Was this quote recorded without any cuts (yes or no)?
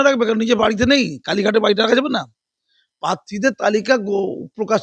yes